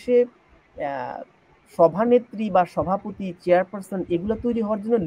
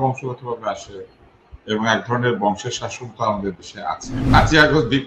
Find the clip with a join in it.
second; 1 cut; at 4.1 s

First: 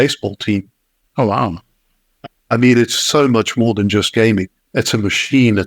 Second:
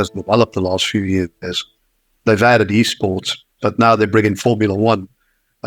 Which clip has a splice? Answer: first; 1 cut; at 4.6 s

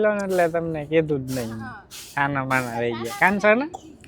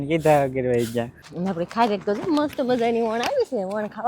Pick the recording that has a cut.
second; 1 cut; at 1.2 s

